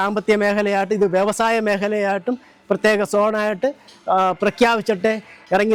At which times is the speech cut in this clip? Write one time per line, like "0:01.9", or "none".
none